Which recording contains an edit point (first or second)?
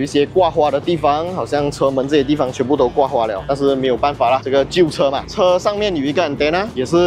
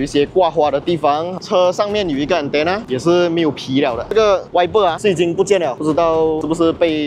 second